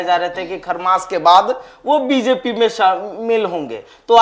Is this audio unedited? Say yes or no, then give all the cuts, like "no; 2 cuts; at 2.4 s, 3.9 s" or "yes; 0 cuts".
yes; 0 cuts